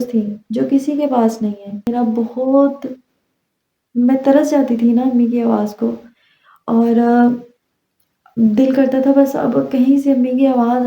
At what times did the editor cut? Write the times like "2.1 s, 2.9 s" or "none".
1.9 s